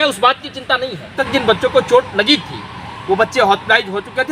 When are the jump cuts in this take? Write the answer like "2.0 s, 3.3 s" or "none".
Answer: 1.2 s